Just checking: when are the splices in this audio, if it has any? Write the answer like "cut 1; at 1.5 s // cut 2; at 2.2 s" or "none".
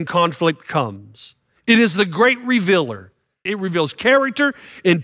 cut 1; at 3.4 s